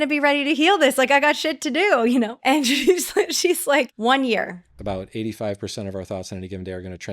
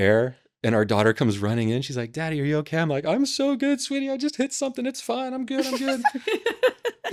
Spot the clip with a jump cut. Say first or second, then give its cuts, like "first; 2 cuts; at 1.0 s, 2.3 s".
first; 3 cuts; at 2.3 s, 3.9 s, 4.7 s